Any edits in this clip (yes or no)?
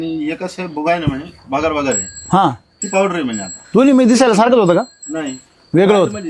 no